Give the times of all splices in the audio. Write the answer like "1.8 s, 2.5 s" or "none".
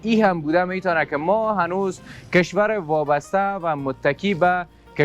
none